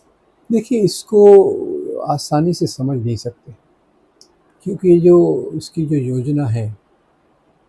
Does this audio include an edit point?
no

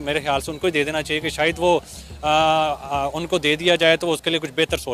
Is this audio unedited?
yes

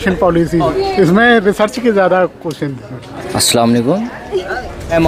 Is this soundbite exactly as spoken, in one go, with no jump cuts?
yes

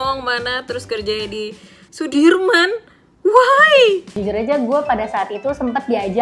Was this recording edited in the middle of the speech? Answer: yes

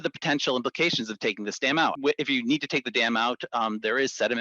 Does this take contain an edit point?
yes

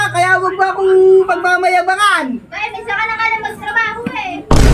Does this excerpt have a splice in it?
no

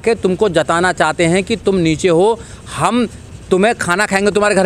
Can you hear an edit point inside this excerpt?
no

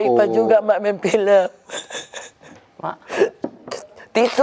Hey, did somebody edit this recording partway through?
no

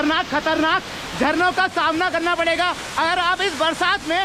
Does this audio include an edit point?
no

